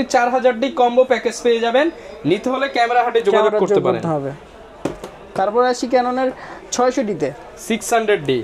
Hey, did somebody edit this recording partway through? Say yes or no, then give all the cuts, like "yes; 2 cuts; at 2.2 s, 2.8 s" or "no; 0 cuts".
no; 0 cuts